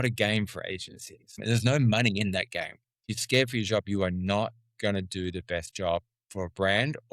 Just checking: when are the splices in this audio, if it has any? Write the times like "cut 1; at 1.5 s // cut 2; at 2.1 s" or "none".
cut 1; at 1.4 s // cut 2; at 3.1 s